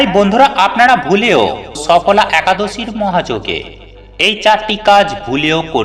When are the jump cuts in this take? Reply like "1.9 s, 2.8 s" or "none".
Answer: 1.8 s